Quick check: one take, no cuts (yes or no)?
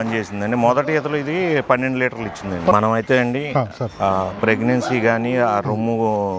no